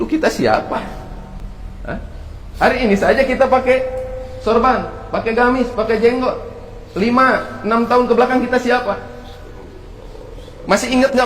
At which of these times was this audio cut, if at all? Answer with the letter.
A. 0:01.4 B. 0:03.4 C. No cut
A